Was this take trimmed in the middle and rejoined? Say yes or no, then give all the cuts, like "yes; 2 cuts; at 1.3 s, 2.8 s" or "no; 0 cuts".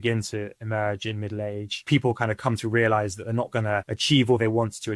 yes; 1 cut; at 1.9 s